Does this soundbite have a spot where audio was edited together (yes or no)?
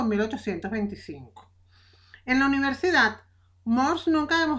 yes